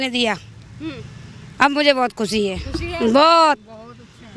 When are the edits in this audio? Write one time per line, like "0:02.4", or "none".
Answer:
none